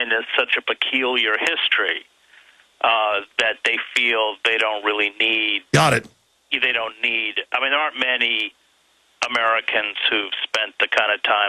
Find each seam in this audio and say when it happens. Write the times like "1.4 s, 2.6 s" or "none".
none